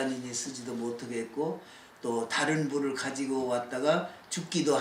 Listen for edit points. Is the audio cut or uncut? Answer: uncut